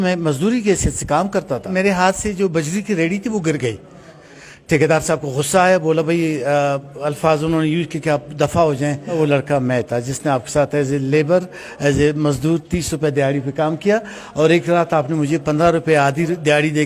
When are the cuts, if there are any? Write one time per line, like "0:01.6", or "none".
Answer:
0:01.7
0:09.2